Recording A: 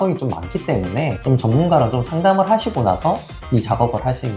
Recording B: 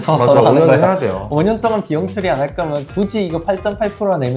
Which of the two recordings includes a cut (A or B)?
A